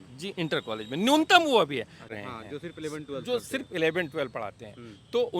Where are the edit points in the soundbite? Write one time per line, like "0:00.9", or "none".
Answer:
0:02.1